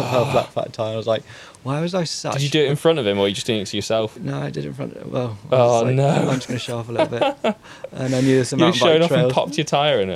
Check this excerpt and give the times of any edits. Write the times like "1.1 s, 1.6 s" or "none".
none